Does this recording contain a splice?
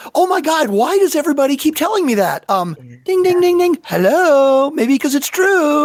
no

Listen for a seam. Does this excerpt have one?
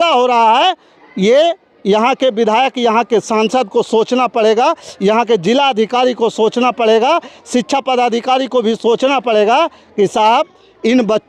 no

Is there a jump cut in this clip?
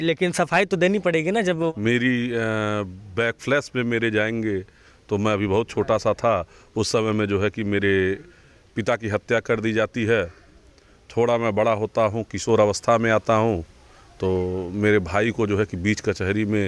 yes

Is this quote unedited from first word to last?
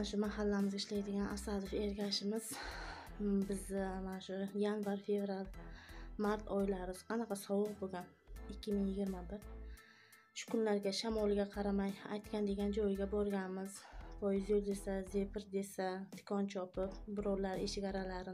yes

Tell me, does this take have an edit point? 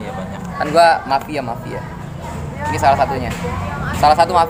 no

